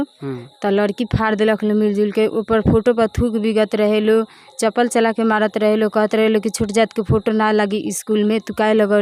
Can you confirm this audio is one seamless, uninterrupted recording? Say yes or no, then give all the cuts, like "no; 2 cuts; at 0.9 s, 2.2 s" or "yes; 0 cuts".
yes; 0 cuts